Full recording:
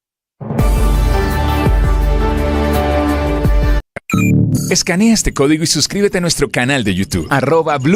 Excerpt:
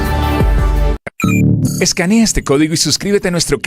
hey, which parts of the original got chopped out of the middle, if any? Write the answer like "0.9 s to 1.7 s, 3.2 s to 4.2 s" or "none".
2.2 s to 3.8 s